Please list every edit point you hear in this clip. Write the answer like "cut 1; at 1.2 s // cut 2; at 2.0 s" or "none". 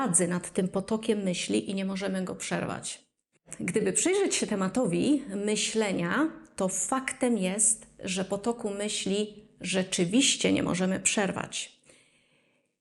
cut 1; at 3.5 s